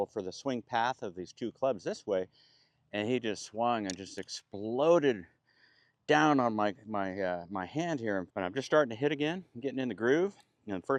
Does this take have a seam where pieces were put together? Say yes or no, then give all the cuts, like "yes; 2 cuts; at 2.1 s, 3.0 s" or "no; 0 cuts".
yes; 1 cut; at 8.3 s